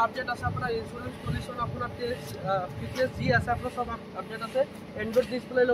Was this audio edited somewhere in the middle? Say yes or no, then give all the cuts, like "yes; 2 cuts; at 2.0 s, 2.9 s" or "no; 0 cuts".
no; 0 cuts